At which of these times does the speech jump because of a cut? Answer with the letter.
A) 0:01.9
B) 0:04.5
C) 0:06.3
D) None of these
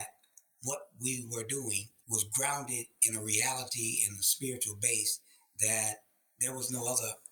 A